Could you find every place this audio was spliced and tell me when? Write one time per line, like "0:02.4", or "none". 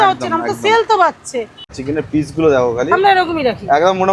0:01.7

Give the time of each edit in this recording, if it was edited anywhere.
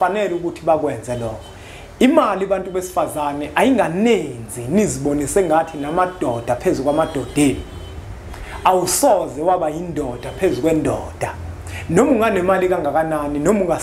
none

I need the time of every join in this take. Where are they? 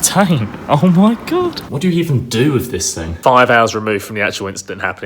0:01.7
0:03.2

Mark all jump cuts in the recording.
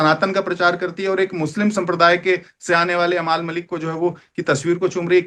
none

